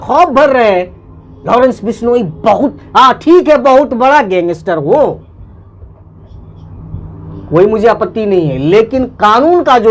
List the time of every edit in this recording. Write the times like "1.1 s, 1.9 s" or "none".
none